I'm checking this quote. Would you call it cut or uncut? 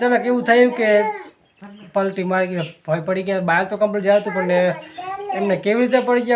uncut